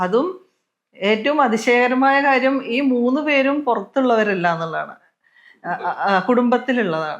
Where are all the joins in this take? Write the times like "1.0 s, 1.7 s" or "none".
none